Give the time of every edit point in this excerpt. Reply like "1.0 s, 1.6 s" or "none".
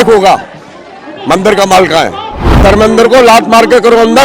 2.6 s